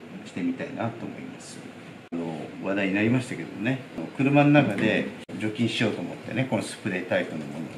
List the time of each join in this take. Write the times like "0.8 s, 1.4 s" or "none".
2.1 s, 4.0 s, 5.3 s